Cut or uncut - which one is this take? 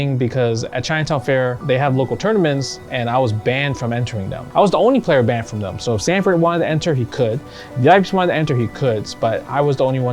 cut